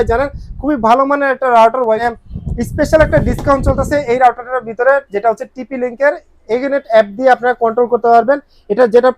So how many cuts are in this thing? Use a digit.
1